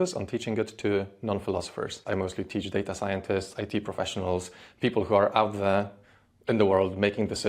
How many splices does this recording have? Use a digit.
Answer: 1